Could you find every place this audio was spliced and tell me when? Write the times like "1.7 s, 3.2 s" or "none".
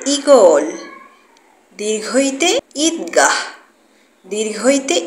2.7 s